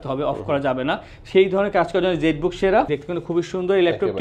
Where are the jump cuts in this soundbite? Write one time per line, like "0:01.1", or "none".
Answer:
0:02.9